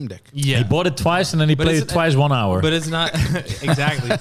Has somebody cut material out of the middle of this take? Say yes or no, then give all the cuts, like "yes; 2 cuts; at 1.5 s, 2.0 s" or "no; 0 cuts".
no; 0 cuts